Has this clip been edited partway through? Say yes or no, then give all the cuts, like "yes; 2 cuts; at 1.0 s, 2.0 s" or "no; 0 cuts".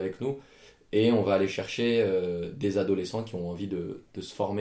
no; 0 cuts